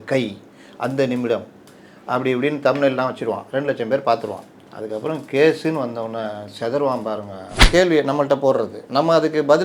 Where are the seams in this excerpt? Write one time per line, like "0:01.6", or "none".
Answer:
0:07.6